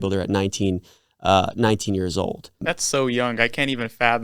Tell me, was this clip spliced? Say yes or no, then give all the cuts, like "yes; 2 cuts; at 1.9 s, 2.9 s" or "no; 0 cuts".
yes; 1 cut; at 2.7 s